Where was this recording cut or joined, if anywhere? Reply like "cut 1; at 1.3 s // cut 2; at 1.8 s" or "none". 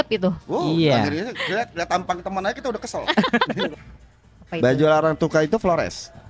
cut 1; at 3.7 s